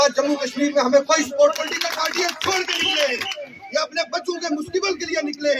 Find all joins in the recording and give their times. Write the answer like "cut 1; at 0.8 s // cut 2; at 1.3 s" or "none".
cut 1; at 1.6 s